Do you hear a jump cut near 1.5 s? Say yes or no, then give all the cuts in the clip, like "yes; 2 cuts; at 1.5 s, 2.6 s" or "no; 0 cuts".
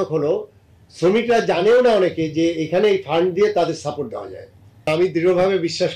no; 1 cut; at 4.9 s